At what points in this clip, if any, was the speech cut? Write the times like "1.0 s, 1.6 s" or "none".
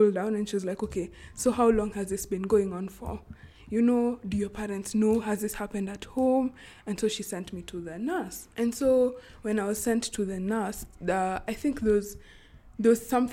none